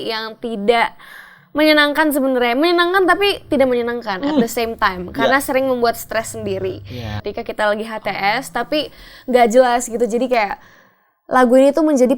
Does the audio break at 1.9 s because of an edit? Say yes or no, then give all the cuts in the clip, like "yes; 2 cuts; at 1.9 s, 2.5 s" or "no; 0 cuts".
no; 1 cut; at 7.2 s